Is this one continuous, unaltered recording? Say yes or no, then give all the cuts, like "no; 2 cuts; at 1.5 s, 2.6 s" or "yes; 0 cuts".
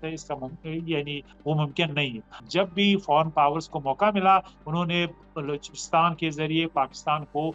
no; 1 cut; at 2.2 s